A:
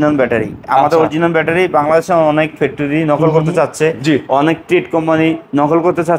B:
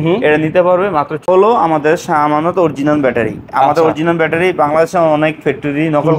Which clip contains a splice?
B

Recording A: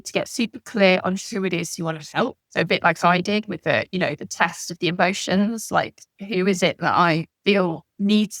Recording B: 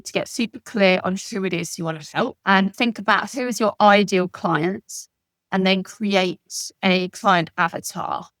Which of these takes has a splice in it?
B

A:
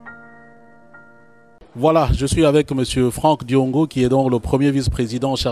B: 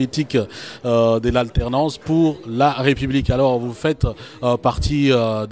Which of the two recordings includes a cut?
A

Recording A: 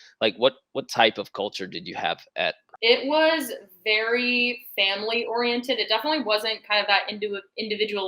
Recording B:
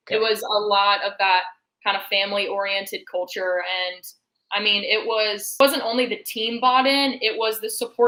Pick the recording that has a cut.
A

